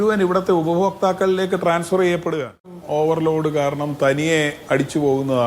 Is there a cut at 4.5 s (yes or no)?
no